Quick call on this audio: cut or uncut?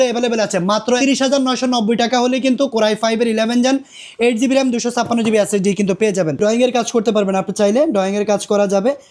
cut